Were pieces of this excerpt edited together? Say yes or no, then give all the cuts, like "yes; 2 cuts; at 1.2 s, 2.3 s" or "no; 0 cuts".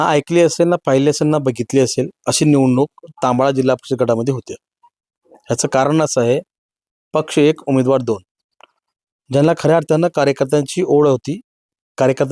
no; 0 cuts